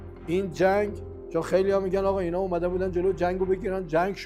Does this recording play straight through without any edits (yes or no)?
yes